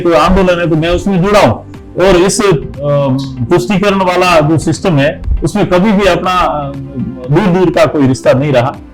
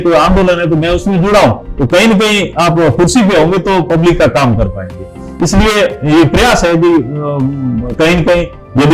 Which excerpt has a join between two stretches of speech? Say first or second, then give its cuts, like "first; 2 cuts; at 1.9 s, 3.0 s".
second; 1 cut; at 1.7 s